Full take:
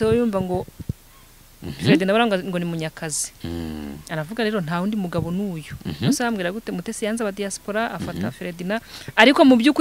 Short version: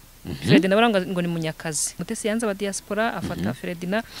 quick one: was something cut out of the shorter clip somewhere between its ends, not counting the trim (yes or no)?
yes